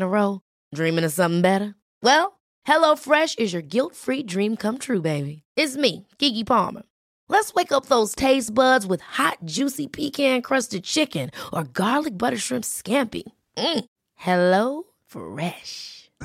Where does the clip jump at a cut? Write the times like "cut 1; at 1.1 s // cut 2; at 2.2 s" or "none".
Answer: none